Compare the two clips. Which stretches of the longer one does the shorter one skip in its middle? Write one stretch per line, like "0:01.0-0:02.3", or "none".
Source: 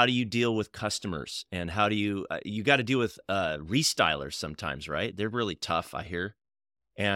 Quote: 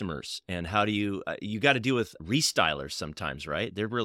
0:03.2-0:03.6